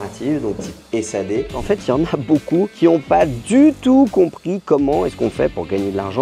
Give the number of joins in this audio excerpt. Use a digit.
2